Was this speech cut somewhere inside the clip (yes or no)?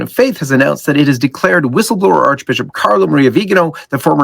yes